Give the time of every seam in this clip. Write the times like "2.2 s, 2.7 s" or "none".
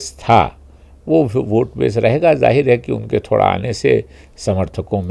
none